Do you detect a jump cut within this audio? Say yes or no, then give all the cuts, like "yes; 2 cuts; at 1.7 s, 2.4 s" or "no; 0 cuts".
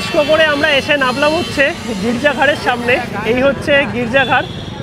no; 0 cuts